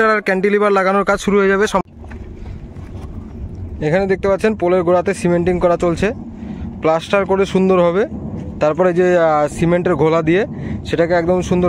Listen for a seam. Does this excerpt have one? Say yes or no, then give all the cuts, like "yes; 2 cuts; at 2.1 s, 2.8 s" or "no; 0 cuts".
yes; 1 cut; at 1.8 s